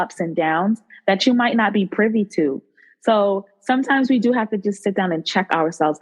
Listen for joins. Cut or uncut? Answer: uncut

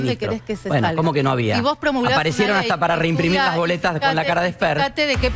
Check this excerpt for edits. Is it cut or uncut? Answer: uncut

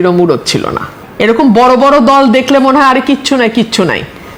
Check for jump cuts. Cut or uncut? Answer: uncut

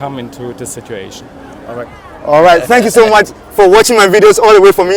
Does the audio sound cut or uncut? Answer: uncut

